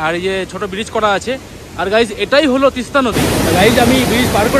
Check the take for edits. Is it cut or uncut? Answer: cut